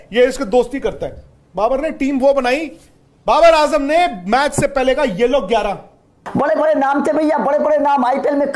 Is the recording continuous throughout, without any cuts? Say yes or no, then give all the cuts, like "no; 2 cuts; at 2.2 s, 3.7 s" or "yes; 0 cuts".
no; 1 cut; at 6.2 s